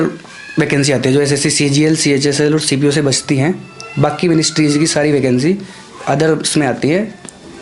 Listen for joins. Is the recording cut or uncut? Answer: uncut